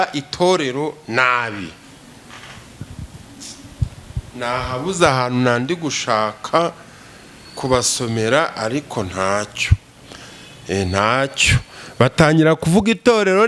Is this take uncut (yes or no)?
yes